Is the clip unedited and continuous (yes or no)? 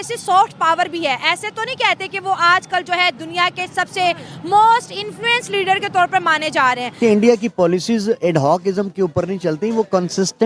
no